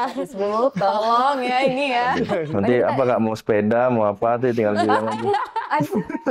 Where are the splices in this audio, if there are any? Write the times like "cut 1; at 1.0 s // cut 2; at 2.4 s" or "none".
cut 1; at 2.5 s